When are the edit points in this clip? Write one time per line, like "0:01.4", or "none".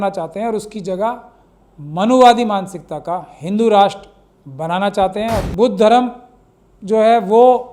0:05.4